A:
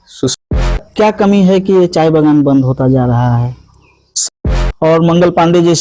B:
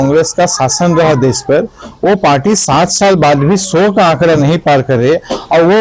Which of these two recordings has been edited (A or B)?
A